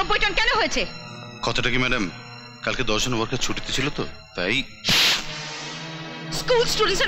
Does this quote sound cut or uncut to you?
uncut